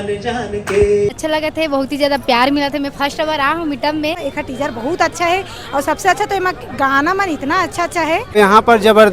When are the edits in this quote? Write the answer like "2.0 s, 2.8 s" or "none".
1.2 s, 4.2 s, 8.3 s